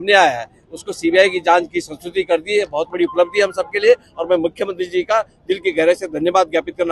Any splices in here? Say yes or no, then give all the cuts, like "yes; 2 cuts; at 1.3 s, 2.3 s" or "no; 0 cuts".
no; 0 cuts